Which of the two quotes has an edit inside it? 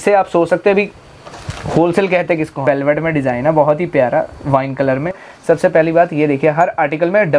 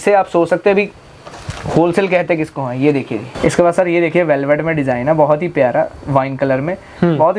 first; 2 cuts; at 2.6 s, 5.2 s

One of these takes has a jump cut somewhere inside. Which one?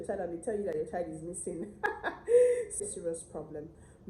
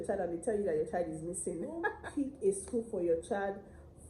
second; 1 cut; at 2.0 s

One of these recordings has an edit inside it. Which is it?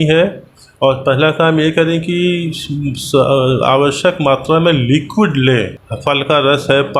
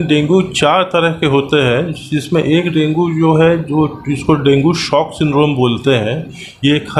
first; 1 cut; at 5.8 s

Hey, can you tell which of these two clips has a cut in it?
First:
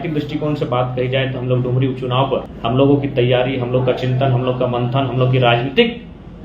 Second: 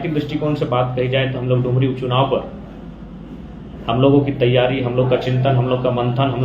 first; 1 cut; at 2.5 s

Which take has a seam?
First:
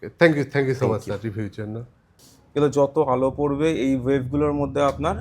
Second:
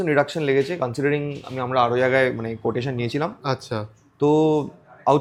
first; 1 cut; at 1.8 s

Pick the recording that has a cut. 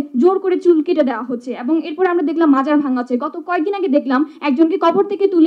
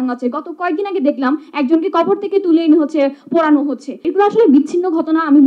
second; 1 cut; at 4.0 s

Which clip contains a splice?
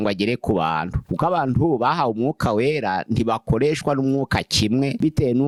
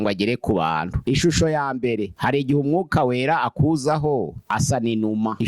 second; 1 cut; at 0.9 s

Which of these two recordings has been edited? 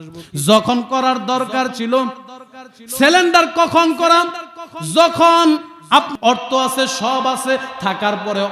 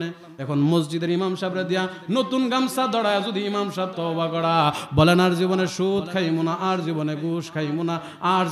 first; 1 cut; at 6.1 s

